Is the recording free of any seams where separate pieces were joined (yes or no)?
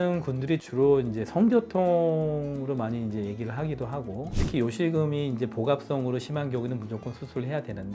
no